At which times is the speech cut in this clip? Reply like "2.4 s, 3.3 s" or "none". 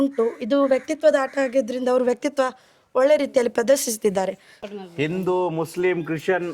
4.5 s